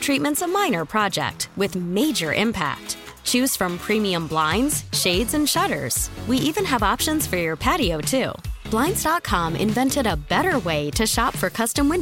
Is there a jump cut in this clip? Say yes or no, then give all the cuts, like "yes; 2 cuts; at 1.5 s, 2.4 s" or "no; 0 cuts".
no; 0 cuts